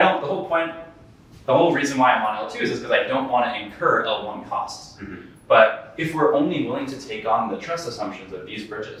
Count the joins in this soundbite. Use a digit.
0